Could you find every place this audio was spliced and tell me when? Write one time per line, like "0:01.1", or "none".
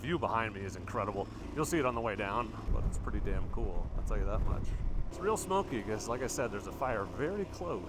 0:02.6
0:05.0